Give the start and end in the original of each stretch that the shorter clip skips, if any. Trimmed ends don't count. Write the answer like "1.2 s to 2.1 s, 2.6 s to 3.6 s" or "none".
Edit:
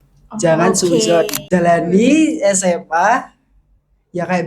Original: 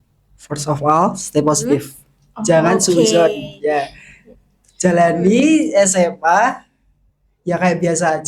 3.4 s to 4.7 s